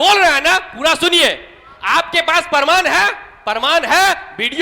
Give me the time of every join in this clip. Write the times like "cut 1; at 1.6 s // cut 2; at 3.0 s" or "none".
none